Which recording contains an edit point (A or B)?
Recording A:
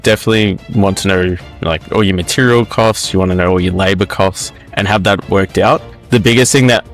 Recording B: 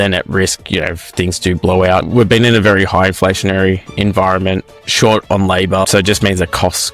B